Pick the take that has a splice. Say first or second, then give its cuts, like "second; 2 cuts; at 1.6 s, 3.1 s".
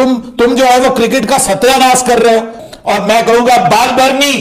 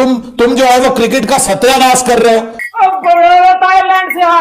second; 1 cut; at 2.6 s